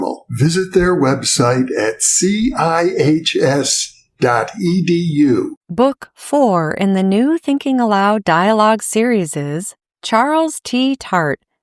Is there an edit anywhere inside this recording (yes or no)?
yes